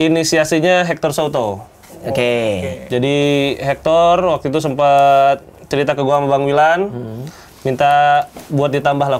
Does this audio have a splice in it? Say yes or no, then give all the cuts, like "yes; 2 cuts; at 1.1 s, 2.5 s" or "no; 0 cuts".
no; 0 cuts